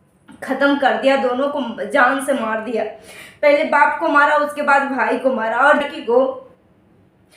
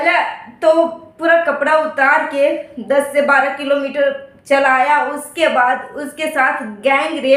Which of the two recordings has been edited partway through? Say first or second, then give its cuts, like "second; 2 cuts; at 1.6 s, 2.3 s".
first; 1 cut; at 5.8 s